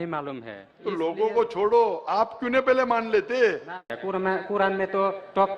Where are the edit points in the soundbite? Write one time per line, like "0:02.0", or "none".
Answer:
0:03.9